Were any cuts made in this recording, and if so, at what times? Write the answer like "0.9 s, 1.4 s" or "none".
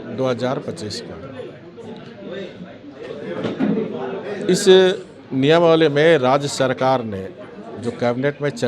none